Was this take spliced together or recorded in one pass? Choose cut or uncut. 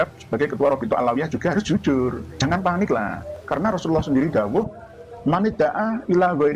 cut